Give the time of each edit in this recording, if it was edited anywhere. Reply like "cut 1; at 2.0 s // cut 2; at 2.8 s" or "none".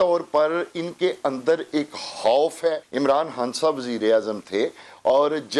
cut 1; at 2.9 s